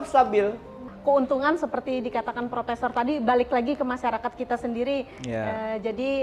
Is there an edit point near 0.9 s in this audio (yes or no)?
yes